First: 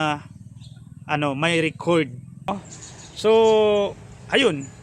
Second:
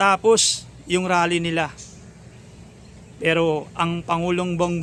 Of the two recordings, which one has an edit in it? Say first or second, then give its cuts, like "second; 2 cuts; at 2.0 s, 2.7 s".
first; 1 cut; at 2.5 s